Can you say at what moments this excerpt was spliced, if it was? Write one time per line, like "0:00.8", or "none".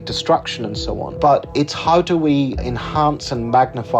0:01.1
0:02.6